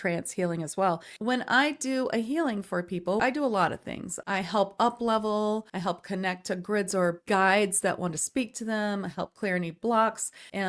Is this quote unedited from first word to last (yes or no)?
no